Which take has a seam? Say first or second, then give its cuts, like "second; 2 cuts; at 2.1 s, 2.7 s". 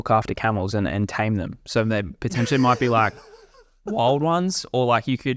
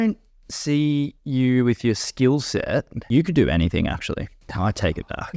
second; 1 cut; at 3.0 s